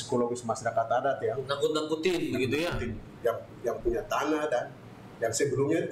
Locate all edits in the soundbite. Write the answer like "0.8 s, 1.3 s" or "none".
none